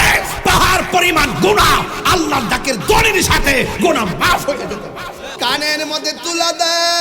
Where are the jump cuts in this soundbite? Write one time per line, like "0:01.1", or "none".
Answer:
0:05.4